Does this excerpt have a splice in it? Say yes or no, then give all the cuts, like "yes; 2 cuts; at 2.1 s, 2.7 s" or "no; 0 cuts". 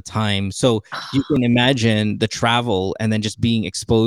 no; 0 cuts